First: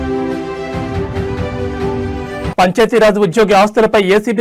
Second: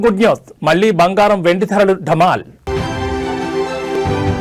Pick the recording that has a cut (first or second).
first